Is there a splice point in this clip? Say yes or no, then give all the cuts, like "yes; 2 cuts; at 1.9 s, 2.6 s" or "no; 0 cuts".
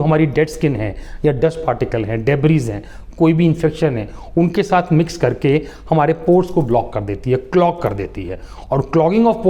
no; 0 cuts